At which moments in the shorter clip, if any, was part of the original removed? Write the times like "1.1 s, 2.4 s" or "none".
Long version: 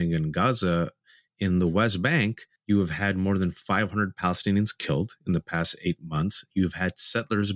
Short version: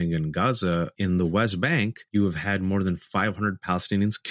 0.9 s, 2.0 s